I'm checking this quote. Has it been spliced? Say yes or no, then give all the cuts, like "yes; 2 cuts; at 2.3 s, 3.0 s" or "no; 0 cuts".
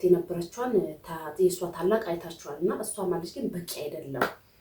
no; 0 cuts